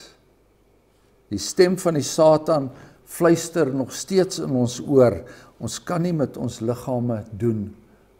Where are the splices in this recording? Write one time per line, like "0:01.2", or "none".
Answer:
none